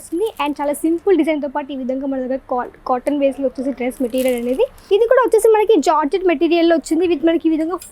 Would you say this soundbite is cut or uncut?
cut